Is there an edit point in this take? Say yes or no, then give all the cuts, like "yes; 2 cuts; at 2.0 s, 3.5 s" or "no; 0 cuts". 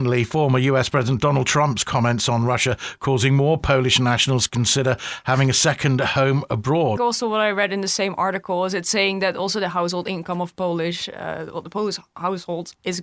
yes; 1 cut; at 7.0 s